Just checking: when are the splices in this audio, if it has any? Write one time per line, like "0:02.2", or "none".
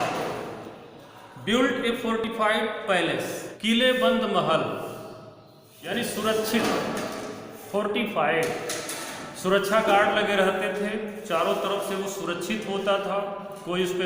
0:03.5
0:05.8